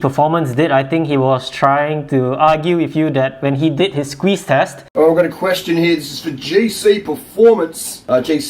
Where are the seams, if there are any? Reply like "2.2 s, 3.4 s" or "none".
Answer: 4.8 s